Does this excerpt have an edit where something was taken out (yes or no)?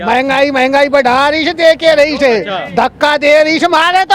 no